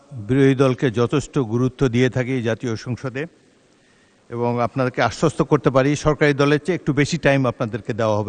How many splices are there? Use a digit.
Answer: 0